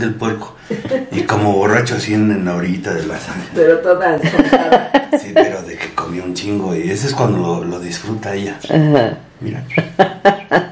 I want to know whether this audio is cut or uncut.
uncut